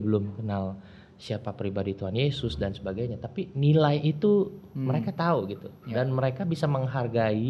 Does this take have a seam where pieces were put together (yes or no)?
no